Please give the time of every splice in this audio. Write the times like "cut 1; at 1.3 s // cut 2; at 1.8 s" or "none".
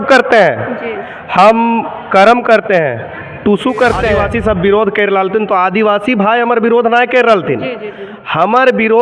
cut 1; at 4.2 s